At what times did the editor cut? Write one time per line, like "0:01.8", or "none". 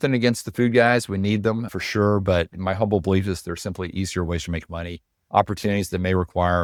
none